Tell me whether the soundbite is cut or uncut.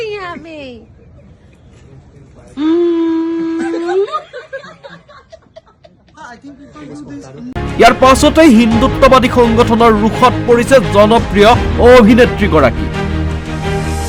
uncut